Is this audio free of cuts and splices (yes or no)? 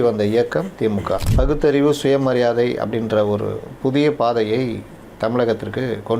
no